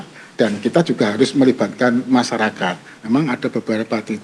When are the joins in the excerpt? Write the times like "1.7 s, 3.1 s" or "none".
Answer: 2.9 s